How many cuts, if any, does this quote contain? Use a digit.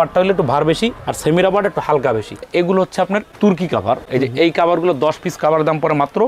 1